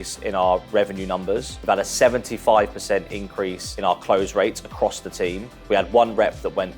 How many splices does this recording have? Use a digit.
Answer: 3